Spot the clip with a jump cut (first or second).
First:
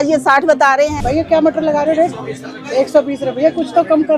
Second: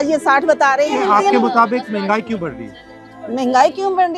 first